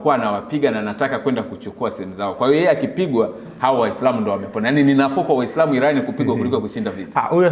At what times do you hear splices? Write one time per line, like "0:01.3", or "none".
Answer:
none